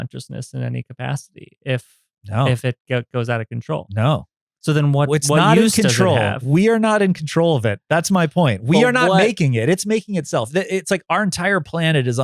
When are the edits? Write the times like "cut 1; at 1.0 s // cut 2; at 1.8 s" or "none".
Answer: none